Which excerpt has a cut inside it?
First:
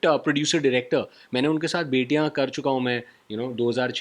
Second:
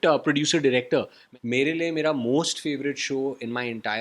second; 1 cut; at 1.2 s

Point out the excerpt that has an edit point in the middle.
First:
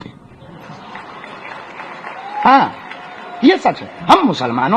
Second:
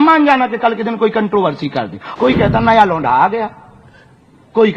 second; 1 cut; at 2.0 s

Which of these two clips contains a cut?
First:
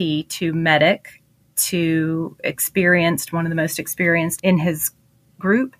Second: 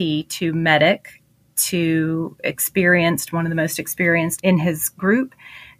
second; 1 cut; at 4.9 s

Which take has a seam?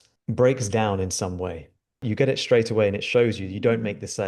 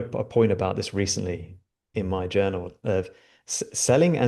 first; 1 cut; at 2.0 s

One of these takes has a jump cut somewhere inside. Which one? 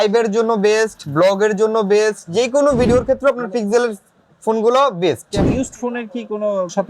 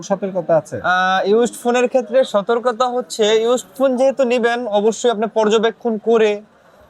first; 2 cuts; at 2.9 s, 5.4 s

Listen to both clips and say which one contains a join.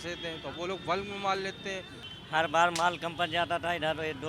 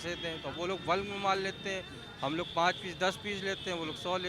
first; 1 cut; at 2.0 s

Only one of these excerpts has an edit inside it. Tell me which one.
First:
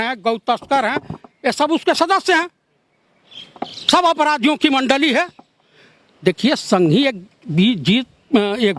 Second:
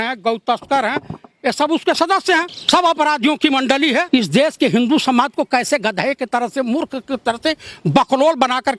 second; 2 cuts; at 2.6 s, 4.1 s

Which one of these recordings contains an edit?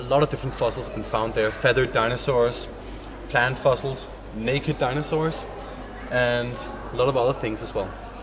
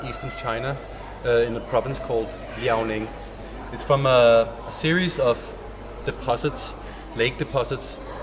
first; 1 cut; at 5.4 s

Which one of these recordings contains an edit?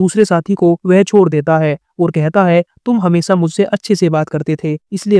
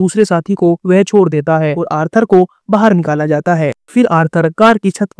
second; 2 cuts; at 1.8 s, 3.8 s

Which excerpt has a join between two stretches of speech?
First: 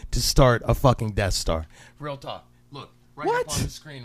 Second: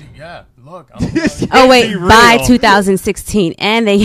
first; 1 cut; at 1.1 s

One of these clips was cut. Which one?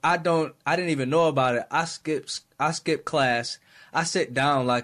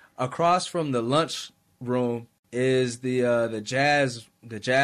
second; 1 cut; at 2.3 s

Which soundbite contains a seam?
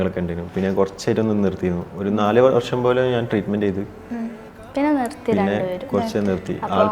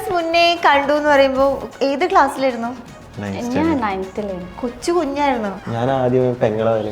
second; 1 cut; at 5.5 s

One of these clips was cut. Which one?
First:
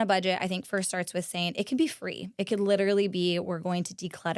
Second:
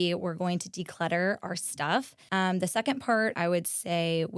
second; 2 cuts; at 2.2 s, 3.3 s

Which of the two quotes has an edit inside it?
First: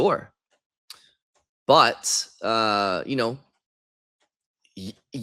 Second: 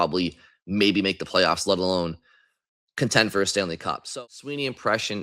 second; 1 cut; at 4.1 s

